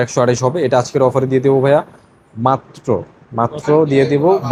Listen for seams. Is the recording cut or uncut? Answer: uncut